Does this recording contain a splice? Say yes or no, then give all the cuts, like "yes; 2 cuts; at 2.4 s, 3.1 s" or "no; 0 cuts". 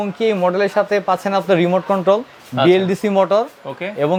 no; 0 cuts